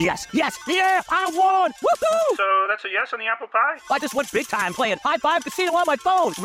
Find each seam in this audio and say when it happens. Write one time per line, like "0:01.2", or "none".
none